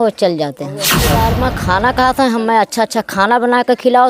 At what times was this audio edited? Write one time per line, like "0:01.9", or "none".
0:01.1